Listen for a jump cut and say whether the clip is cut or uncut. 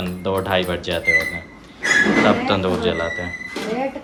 uncut